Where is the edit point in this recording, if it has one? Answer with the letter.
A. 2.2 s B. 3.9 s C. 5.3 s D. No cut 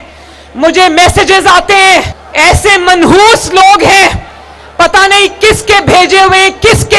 A